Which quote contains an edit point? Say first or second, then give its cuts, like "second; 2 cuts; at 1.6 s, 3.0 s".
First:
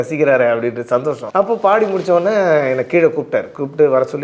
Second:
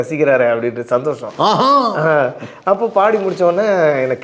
first; 1 cut; at 1.2 s